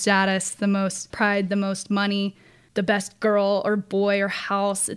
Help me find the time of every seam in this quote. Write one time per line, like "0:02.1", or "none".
0:01.1
0:02.6